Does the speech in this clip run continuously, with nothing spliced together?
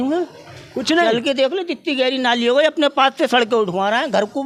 yes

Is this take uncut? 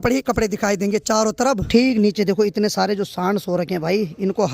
no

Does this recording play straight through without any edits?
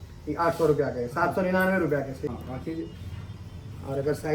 no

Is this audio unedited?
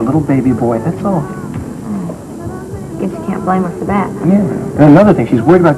no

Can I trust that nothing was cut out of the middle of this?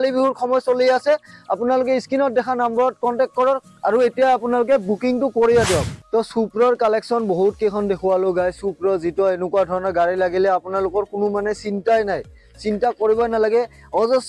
no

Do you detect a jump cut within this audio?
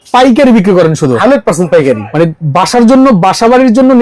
no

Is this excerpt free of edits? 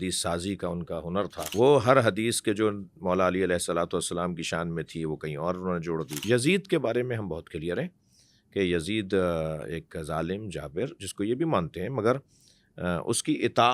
no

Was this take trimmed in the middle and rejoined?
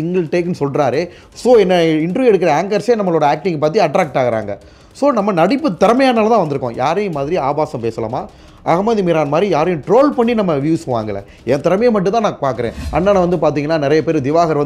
yes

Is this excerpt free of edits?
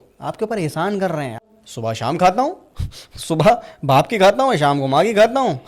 no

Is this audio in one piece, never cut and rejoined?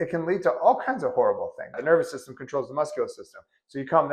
no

